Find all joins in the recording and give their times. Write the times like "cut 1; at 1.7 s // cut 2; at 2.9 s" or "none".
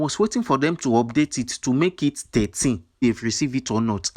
cut 1; at 2.9 s